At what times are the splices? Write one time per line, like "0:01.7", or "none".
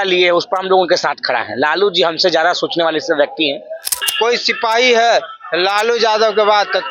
0:04.0